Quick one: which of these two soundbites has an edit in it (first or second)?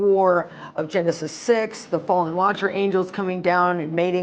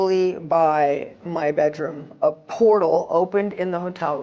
second